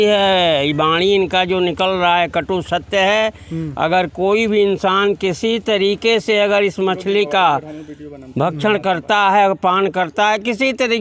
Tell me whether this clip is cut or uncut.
uncut